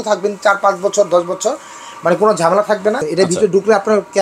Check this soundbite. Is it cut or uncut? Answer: cut